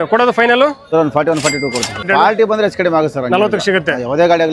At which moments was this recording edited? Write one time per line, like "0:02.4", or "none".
0:00.8
0:02.0